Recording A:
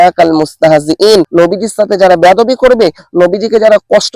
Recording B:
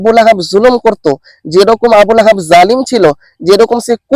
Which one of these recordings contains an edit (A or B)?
A